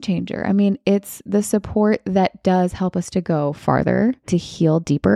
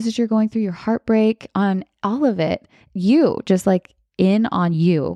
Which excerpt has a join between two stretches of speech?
first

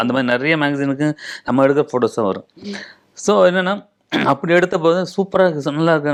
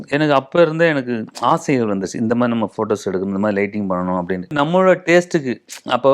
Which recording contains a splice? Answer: second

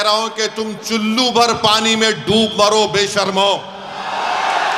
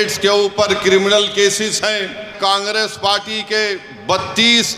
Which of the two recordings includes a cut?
second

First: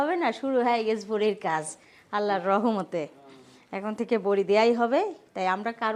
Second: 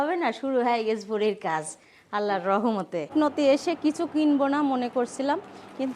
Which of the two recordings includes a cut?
second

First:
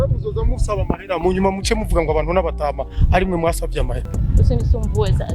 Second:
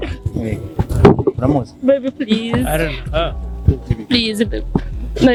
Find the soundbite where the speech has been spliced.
first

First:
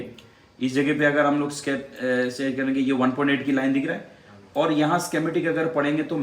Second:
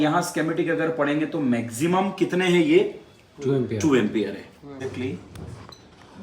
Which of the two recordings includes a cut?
second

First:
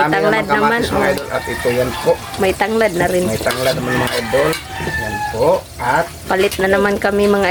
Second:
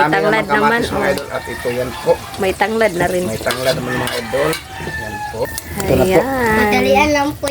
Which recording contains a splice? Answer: second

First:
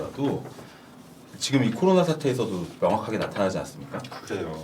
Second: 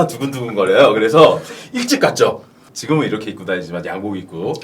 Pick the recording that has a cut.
second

